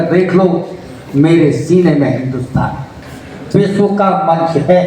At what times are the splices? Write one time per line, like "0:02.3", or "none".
0:02.8